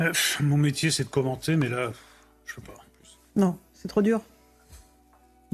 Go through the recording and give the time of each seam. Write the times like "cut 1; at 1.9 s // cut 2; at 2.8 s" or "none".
none